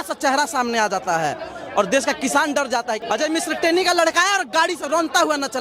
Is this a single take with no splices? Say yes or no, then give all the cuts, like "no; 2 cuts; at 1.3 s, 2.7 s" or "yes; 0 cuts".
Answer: no; 1 cut; at 3.0 s